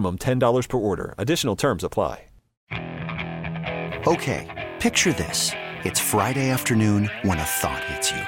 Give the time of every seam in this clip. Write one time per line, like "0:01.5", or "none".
0:02.5